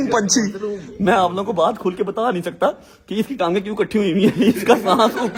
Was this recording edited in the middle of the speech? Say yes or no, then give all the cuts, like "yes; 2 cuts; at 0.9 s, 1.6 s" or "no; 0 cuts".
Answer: no; 0 cuts